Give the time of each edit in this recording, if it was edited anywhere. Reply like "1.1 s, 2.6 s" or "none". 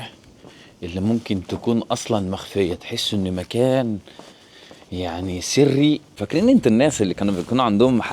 6.2 s